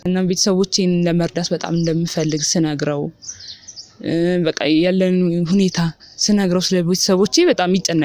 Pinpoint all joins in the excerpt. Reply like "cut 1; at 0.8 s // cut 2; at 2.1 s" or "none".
none